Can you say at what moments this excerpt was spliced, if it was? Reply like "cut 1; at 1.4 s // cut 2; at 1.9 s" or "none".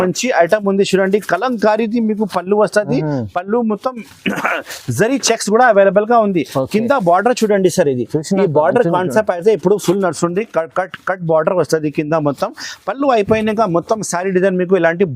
none

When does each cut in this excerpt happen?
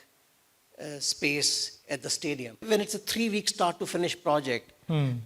cut 1; at 2.6 s

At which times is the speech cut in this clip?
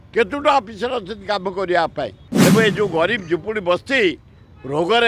cut 1; at 2.2 s

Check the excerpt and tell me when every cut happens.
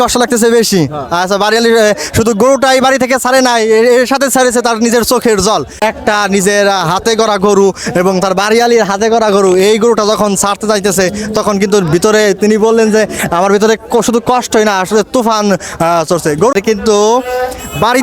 cut 1; at 5.8 s // cut 2; at 16.6 s

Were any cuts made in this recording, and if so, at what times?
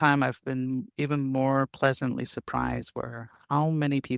none

